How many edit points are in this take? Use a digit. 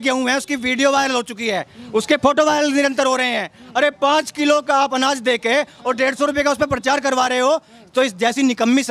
0